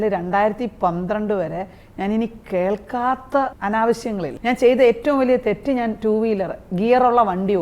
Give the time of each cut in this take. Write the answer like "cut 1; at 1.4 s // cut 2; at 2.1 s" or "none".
cut 1; at 3.6 s // cut 2; at 4.3 s